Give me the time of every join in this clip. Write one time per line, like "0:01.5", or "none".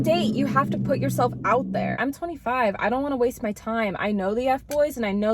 0:02.0